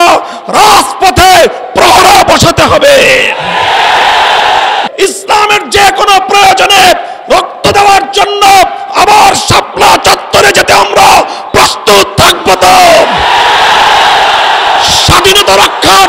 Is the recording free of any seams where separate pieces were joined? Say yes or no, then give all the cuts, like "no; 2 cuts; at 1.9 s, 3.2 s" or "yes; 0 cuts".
no; 1 cut; at 4.9 s